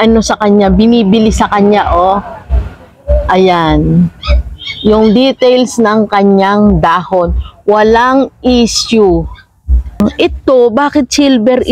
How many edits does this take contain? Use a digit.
1